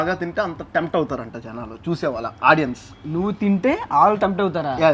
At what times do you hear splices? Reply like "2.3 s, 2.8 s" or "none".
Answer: none